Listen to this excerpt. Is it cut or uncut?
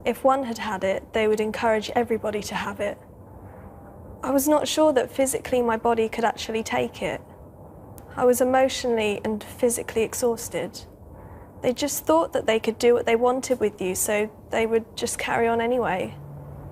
cut